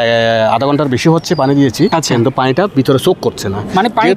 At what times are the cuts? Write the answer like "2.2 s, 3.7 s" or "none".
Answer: 1.9 s